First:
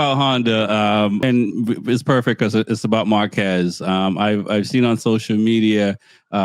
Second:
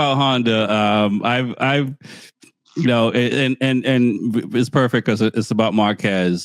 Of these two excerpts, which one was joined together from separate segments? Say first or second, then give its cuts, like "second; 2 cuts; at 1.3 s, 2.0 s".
first; 1 cut; at 1.2 s